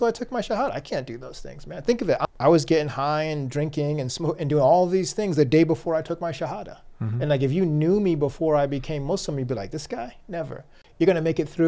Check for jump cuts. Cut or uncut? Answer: cut